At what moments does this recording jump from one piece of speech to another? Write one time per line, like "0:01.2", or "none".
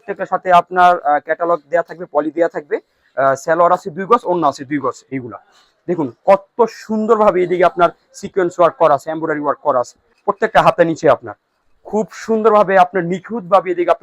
0:05.1
0:10.0